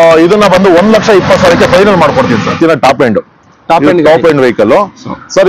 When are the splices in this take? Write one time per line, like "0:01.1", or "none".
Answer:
0:02.6